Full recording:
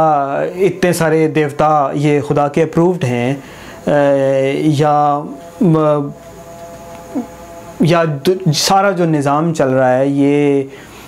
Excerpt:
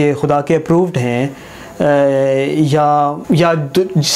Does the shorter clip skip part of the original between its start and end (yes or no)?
yes